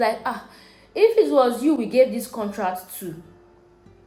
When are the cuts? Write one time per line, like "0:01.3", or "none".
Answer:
none